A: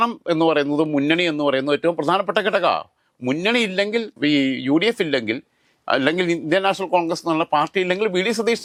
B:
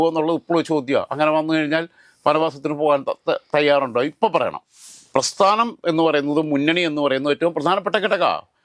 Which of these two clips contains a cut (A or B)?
B